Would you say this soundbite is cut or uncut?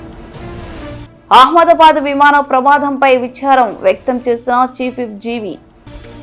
cut